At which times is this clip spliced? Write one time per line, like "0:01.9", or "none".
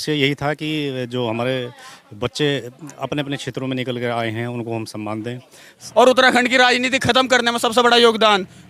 0:05.8